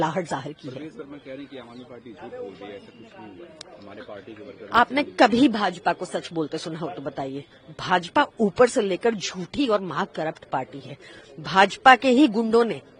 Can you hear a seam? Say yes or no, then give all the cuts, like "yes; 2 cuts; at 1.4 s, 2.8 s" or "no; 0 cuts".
no; 0 cuts